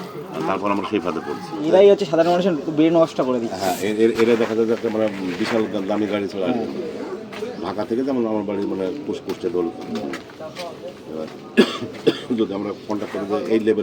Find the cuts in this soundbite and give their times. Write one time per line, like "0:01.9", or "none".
0:01.6